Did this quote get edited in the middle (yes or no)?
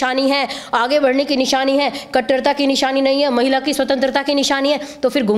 no